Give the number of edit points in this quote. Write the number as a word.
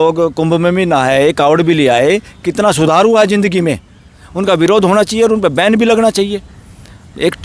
one